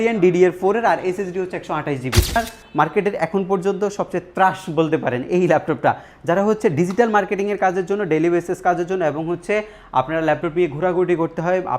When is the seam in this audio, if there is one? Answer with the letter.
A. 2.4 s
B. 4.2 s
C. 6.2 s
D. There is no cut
A